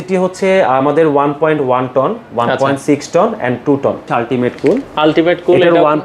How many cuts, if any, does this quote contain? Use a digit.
1